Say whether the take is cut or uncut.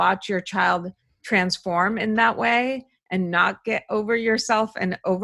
uncut